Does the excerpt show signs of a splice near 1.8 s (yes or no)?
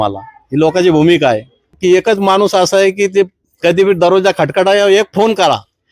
yes